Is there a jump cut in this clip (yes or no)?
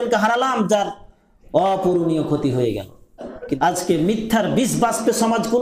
yes